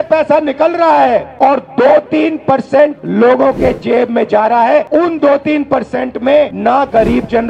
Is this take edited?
yes; 4 cuts; at 1.3 s, 3.0 s, 4.9 s, 6.5 s

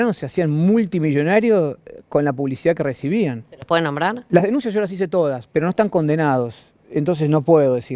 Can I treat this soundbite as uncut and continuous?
yes; 0 cuts

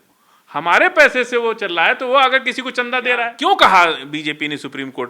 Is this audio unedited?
no; 1 cut; at 3.3 s

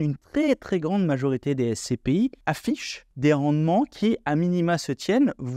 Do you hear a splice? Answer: yes; 1 cut; at 2.6 s

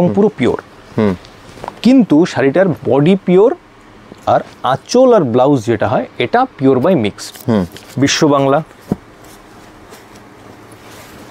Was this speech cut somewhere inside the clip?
yes; 1 cut; at 7.3 s

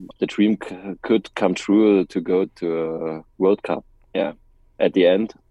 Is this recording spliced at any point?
yes; 1 cut; at 2.5 s

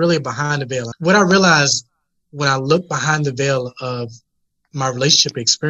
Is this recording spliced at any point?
yes; 1 cut; at 0.9 s

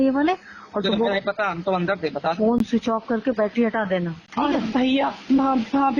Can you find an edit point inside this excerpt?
no; 0 cuts

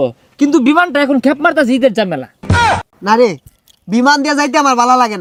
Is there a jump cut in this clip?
no; 0 cuts

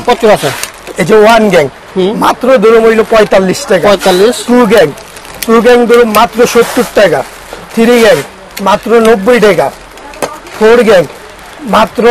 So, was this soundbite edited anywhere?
no; 0 cuts

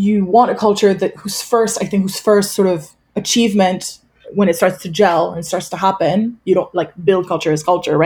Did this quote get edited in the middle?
no; 0 cuts

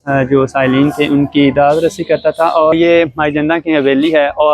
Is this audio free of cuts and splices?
no; 1 cut; at 2.7 s

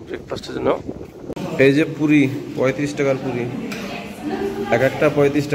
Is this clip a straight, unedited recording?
no; 1 cut; at 1.4 s

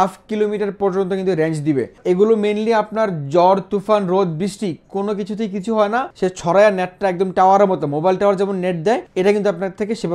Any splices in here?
yes; 3 cuts; at 2.0 s, 6.1 s, 9.1 s

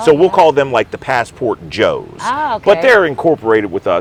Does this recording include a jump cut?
no; 0 cuts

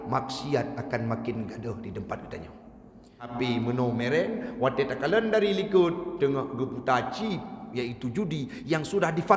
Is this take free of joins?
no; 1 cut; at 3.3 s

